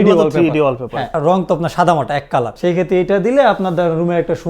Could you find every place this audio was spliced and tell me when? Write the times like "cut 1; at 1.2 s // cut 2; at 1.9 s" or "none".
cut 1; at 1.1 s // cut 2; at 2.5 s

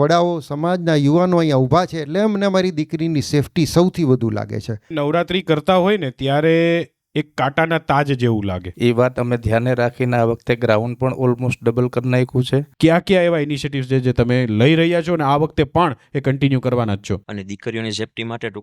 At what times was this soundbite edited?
cut 1; at 4.8 s // cut 2; at 8.7 s // cut 3; at 12.7 s // cut 4; at 17.3 s

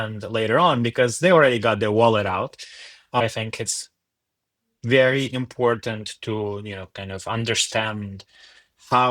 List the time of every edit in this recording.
cut 1; at 3.2 s

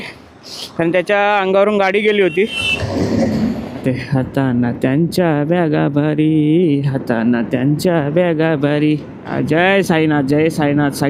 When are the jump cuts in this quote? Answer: cut 1; at 3.8 s // cut 2; at 9.2 s

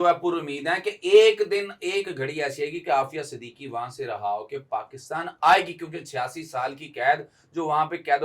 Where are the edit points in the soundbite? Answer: none

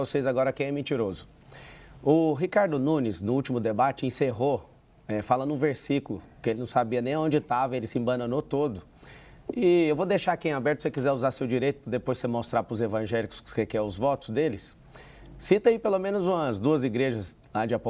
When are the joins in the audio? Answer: none

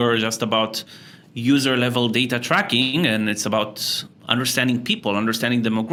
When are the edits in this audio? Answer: none

